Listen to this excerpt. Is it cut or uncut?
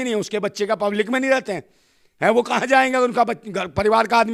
uncut